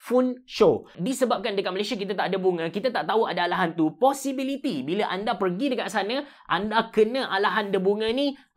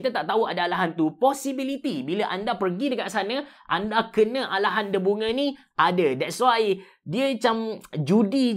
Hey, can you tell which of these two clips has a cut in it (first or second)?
first